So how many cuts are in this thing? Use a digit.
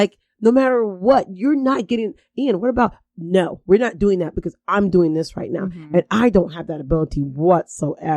0